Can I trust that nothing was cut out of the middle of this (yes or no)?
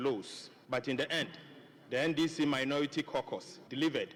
yes